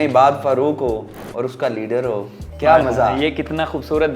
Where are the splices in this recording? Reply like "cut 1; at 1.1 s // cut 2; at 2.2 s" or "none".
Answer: cut 1; at 2.4 s